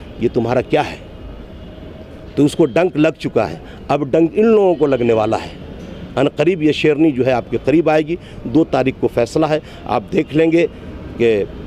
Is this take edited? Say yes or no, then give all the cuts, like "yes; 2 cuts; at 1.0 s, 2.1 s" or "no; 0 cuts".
no; 0 cuts